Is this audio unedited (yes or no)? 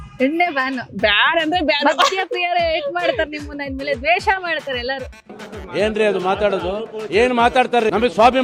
yes